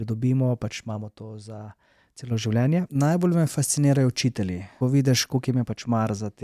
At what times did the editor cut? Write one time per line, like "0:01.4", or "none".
0:02.9
0:04.6